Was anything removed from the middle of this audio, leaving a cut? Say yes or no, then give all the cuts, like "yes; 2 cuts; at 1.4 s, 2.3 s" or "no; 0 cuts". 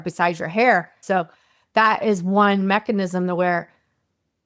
yes; 1 cut; at 1.0 s